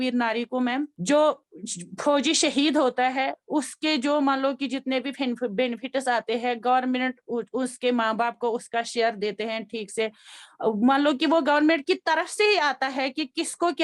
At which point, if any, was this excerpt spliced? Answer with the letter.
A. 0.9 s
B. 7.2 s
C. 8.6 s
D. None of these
A